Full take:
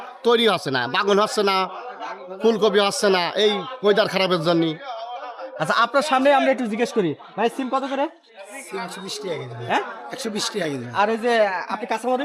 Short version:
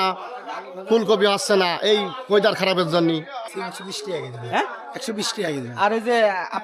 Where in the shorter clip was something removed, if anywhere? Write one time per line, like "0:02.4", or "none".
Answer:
0:03.4

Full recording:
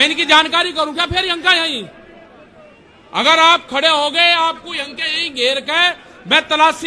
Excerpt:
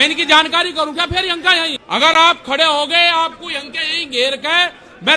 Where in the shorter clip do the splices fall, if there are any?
0:01.8

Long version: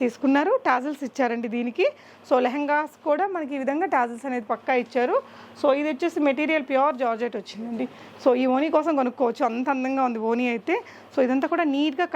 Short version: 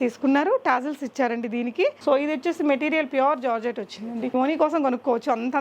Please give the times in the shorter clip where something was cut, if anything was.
0:02.0
0:04.3

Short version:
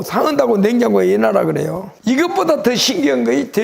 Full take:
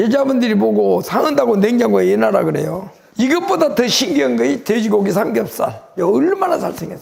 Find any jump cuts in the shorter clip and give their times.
0:01.9

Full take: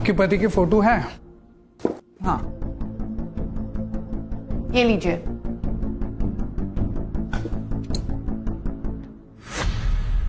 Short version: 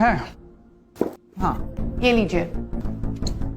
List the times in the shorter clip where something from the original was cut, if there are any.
0:01.7
0:02.8

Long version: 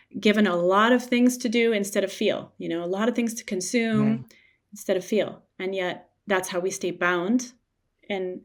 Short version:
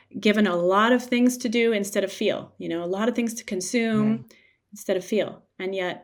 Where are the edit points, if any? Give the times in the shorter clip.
none

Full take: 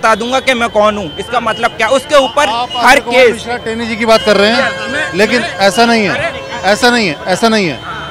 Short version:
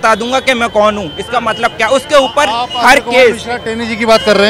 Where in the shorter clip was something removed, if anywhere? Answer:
none

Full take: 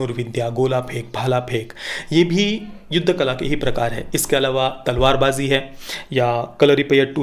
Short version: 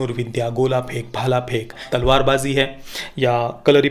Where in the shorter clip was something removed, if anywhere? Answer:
0:01.8

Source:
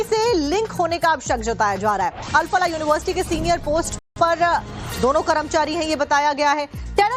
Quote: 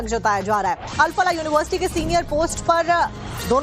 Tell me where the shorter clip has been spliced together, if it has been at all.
0:02.6

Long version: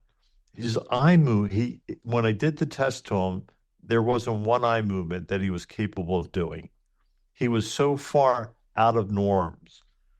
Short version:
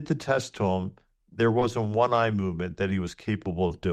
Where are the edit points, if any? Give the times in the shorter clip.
none

